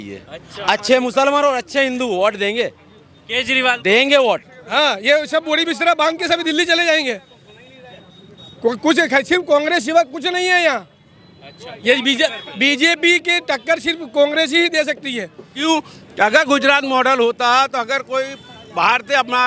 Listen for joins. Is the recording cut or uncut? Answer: cut